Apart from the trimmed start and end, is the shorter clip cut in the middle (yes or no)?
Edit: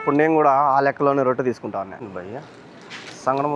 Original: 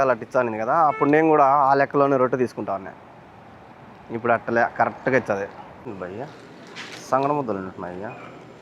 yes